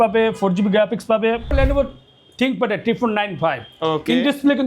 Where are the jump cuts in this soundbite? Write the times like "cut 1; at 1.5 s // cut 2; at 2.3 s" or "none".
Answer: cut 1; at 1.5 s